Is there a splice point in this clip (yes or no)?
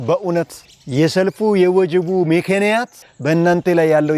no